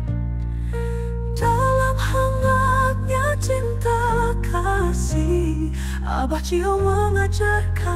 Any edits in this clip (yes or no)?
no